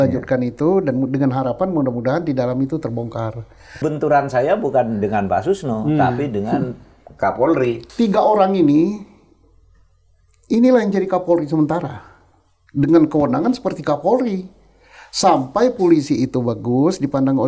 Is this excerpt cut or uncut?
cut